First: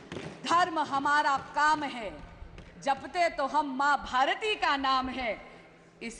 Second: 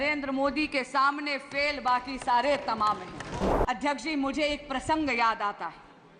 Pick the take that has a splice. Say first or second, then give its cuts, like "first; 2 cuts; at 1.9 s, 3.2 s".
second; 1 cut; at 3.5 s